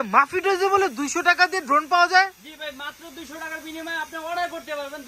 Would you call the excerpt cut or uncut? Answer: uncut